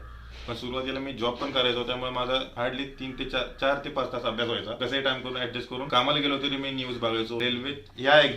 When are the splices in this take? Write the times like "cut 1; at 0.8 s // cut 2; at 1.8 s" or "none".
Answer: cut 1; at 2.5 s // cut 2; at 4.8 s // cut 3; at 5.9 s // cut 4; at 7.4 s